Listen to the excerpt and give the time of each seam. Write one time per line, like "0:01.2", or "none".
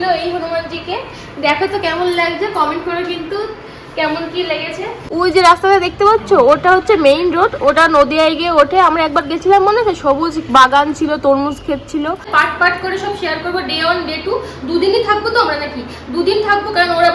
0:04.9
0:12.2